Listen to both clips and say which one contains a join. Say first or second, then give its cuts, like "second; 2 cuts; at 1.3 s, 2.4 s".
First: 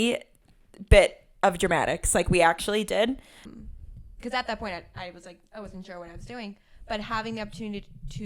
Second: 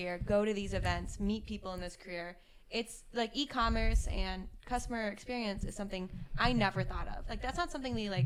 first; 1 cut; at 3.5 s